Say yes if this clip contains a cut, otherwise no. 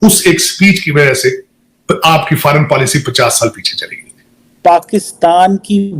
yes